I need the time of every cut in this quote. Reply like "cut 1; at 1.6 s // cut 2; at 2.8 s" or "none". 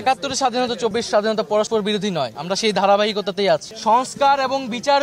cut 1; at 3.7 s